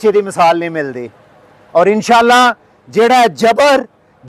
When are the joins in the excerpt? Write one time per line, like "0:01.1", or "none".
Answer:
none